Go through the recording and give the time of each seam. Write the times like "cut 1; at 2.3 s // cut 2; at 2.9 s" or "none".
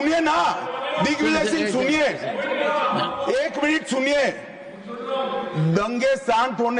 none